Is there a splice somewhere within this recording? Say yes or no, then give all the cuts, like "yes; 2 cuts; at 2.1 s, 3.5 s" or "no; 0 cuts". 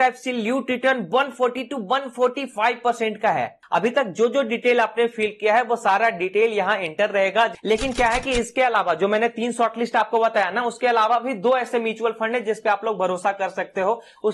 yes; 2 cuts; at 3.6 s, 7.6 s